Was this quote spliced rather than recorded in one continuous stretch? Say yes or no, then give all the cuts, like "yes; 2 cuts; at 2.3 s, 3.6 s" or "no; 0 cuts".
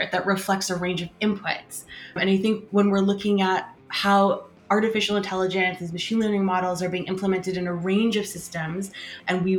no; 0 cuts